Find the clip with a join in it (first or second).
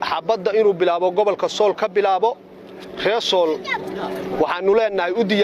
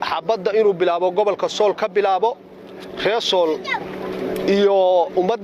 first